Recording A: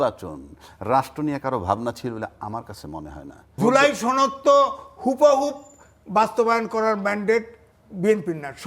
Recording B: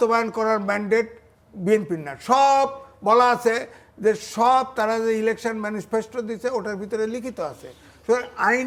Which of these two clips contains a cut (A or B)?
A